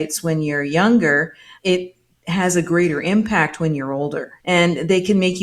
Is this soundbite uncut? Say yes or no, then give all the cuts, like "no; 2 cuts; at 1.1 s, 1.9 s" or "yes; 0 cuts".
no; 2 cuts; at 1.5 s, 4.3 s